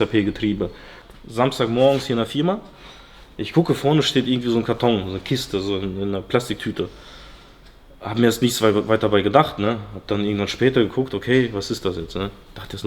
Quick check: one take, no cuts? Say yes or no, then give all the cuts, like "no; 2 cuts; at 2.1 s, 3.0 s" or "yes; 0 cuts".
no; 1 cut; at 1.0 s